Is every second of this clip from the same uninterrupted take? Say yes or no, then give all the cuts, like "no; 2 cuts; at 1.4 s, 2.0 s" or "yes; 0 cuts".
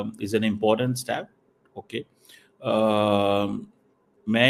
yes; 0 cuts